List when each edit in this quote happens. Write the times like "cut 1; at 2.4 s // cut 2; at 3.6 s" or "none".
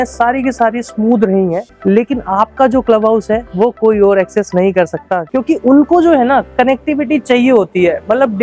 cut 1; at 1.7 s // cut 2; at 5.2 s